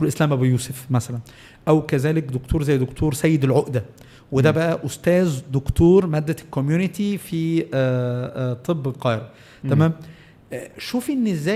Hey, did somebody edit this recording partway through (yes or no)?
no